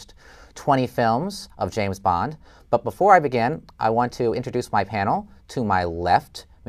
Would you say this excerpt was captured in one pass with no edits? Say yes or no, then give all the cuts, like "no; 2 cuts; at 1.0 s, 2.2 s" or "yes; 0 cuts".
yes; 0 cuts